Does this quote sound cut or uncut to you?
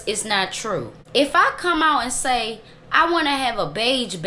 cut